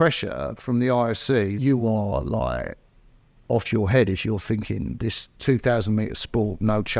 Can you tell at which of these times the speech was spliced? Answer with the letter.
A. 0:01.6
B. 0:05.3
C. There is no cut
A